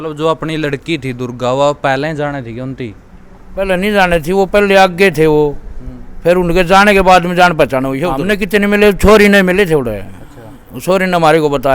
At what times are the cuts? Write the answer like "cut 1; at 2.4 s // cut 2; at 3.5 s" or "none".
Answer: cut 1; at 8.1 s